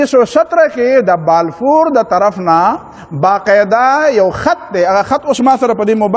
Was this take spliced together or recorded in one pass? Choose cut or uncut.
uncut